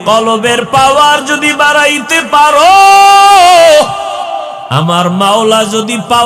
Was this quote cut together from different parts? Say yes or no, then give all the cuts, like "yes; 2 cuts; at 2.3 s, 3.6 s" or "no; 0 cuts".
no; 0 cuts